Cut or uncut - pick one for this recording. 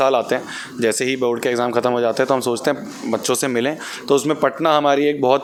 uncut